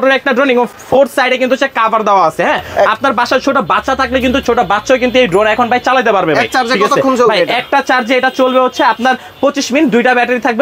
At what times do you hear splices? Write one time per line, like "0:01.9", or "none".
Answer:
none